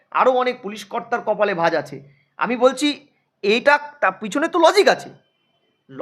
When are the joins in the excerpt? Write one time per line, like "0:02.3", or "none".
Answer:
none